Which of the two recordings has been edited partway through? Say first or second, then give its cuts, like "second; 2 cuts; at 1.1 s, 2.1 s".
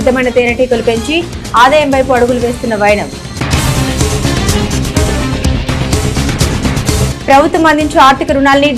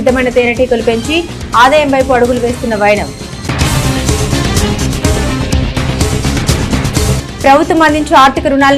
second; 2 cuts; at 3.4 s, 7.3 s